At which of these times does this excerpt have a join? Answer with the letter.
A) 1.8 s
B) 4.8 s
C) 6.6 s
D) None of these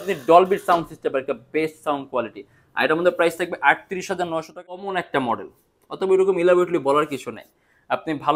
B